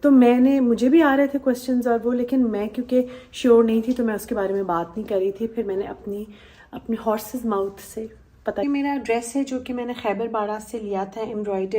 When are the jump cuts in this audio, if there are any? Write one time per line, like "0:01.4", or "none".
0:08.6